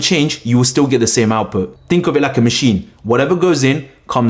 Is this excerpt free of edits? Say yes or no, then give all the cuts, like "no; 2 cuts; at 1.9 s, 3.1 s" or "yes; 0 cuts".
no; 1 cut; at 1.7 s